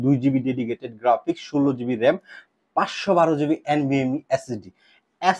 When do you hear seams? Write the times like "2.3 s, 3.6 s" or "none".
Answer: none